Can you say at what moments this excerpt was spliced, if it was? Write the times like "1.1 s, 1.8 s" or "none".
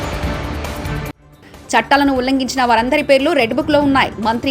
1.3 s